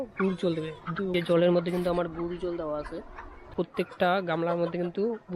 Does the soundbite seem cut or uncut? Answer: cut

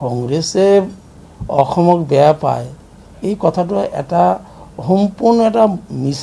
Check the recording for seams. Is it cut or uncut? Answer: uncut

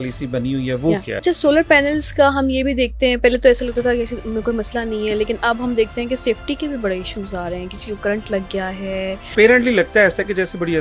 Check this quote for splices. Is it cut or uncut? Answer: cut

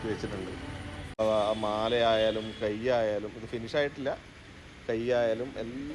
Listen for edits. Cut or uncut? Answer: cut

